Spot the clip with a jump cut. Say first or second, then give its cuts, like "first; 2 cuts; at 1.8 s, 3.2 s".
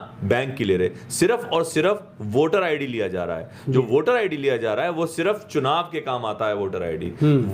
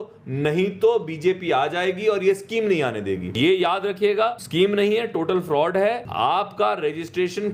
second; 3 cuts; at 3.4 s, 4.4 s, 6.1 s